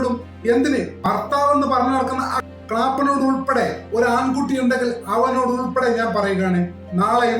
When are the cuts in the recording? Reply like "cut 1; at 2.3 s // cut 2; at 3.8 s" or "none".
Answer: cut 1; at 1.0 s